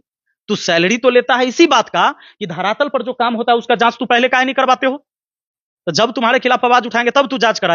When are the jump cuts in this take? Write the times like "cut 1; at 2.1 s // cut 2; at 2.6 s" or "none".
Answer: none